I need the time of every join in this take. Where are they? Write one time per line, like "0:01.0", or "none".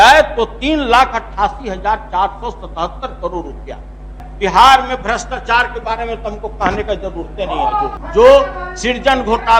0:04.2
0:07.9